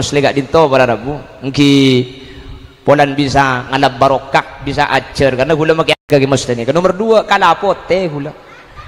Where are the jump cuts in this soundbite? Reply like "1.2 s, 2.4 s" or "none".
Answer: 6.0 s